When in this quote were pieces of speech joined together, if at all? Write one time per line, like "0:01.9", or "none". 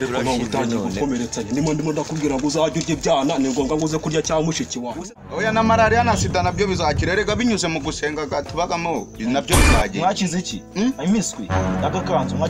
0:05.1